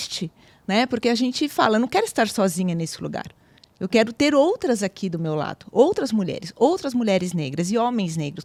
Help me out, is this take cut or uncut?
uncut